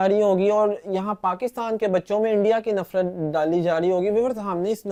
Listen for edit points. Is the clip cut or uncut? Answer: uncut